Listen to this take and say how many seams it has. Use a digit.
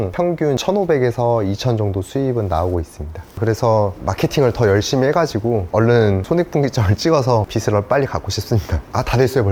0